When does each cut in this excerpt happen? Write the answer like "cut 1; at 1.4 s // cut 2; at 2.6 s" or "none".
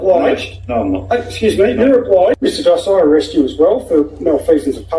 cut 1; at 2.6 s